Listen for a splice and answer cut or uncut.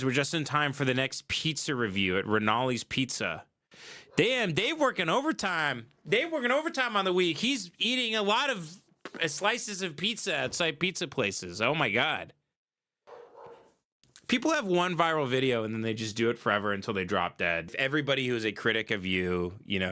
cut